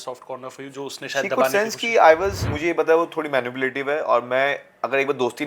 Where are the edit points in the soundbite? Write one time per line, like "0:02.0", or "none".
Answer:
0:02.5